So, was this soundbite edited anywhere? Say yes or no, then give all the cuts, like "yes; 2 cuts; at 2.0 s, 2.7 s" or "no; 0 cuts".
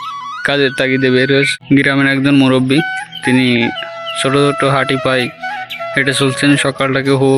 yes; 1 cut; at 1.6 s